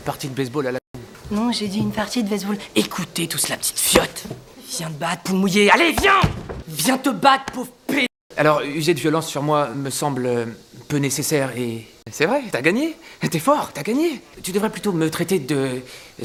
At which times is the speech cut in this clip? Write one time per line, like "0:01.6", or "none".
none